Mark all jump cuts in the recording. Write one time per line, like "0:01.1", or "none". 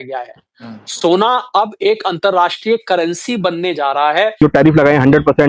0:04.3